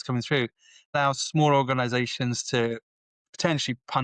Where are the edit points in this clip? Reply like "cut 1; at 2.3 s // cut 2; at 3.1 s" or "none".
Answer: cut 1; at 1.0 s